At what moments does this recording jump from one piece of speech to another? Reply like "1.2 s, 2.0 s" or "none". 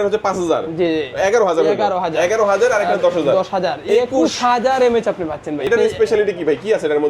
5.7 s